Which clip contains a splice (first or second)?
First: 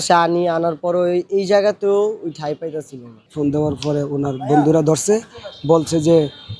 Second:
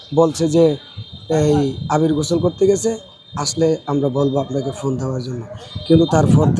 first